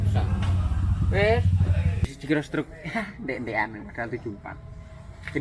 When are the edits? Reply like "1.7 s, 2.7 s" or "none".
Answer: 2.1 s